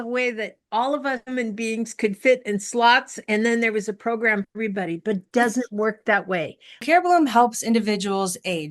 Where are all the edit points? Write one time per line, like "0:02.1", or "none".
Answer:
0:06.8